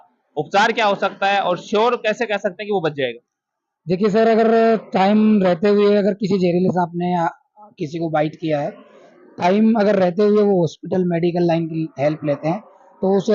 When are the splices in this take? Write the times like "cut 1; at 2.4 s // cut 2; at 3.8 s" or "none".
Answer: none